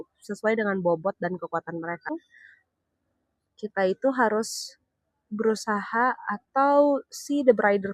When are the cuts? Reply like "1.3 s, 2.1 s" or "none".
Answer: 2.1 s